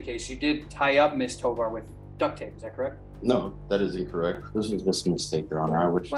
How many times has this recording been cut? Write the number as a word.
one